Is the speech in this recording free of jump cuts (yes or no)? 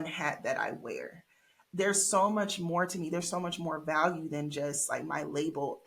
yes